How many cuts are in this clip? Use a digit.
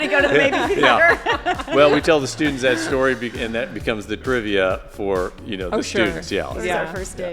1